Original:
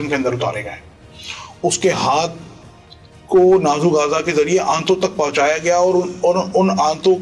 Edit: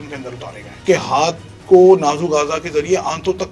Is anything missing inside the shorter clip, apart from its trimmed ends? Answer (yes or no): yes